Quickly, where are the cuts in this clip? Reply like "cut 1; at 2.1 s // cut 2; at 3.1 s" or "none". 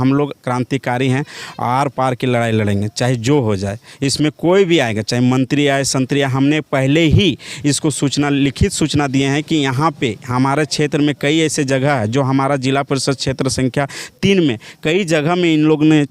none